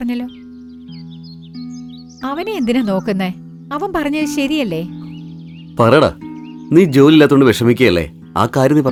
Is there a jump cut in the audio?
no; 0 cuts

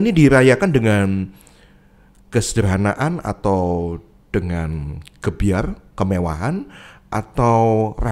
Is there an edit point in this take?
no; 0 cuts

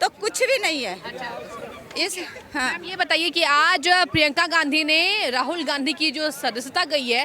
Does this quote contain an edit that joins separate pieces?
no; 0 cuts

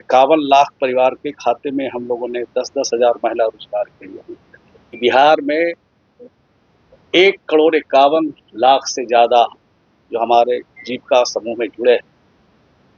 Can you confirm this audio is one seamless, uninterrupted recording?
no; 1 cut; at 5.0 s

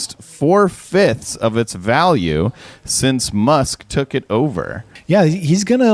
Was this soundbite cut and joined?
yes; 1 cut; at 4.9 s

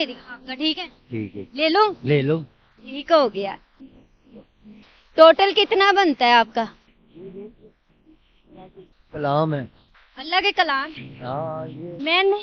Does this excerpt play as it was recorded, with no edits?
yes; 0 cuts

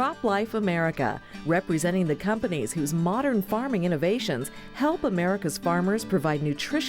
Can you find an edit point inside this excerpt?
no; 0 cuts

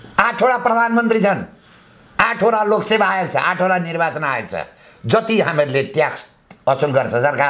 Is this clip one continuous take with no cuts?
yes; 0 cuts

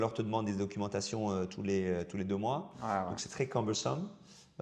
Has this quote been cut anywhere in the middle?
no; 0 cuts

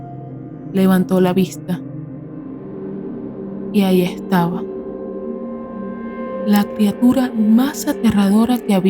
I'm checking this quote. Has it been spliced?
yes; 2 cuts; at 2.0 s, 3.7 s

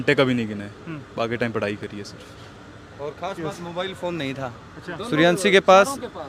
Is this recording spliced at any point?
no; 0 cuts

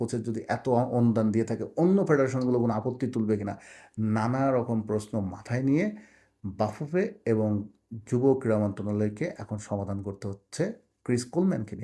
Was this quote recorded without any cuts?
yes; 0 cuts

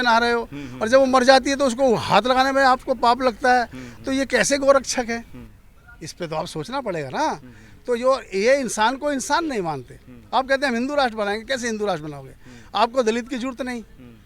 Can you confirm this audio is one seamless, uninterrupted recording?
yes; 0 cuts

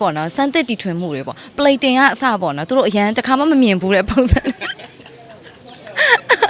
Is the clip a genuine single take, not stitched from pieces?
yes; 0 cuts

